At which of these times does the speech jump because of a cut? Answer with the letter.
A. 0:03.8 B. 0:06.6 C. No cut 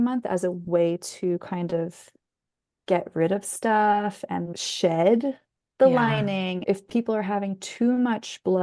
B